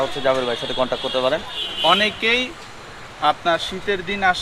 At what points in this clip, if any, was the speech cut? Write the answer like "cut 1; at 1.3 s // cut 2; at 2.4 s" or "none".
cut 1; at 1.7 s